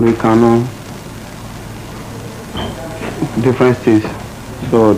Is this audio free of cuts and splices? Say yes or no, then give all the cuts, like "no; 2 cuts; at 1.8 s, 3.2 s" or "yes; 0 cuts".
yes; 0 cuts